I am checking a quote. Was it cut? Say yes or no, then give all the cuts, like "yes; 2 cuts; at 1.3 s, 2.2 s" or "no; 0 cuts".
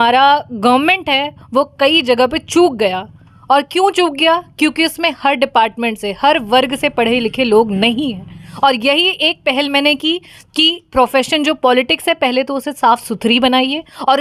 no; 0 cuts